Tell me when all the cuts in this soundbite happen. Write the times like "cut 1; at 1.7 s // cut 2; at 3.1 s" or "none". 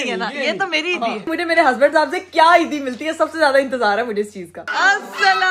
cut 1; at 1.3 s // cut 2; at 4.5 s